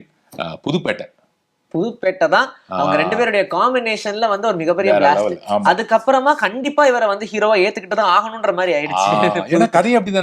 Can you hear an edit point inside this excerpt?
no; 0 cuts

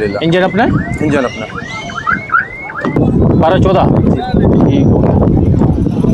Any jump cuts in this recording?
yes; 1 cut; at 3.0 s

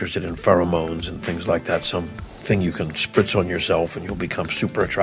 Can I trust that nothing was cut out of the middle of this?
yes; 0 cuts

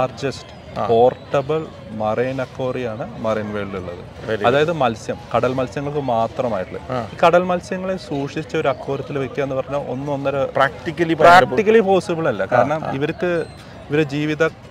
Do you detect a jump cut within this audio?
no; 0 cuts

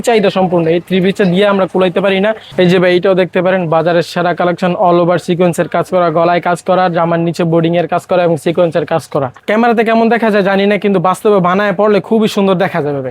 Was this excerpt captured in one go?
no; 2 cuts; at 2.4 s, 9.4 s

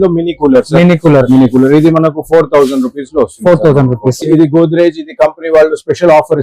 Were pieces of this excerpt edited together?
yes; 1 cut; at 4.2 s

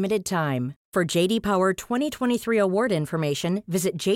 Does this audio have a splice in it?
no; 0 cuts

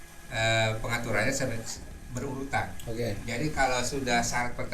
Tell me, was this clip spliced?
no; 0 cuts

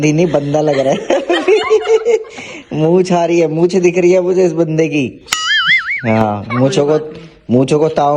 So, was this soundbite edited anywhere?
no; 0 cuts

